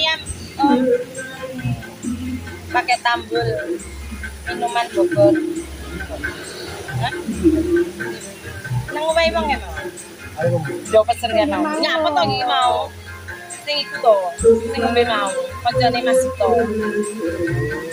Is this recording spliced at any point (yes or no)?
no